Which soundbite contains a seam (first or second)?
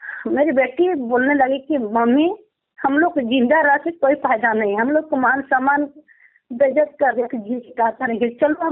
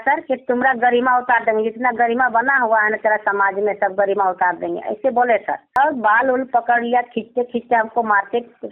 second